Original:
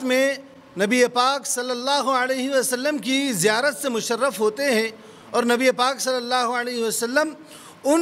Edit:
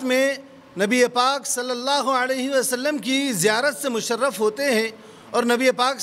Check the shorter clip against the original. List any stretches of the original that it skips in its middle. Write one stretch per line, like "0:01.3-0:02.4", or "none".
none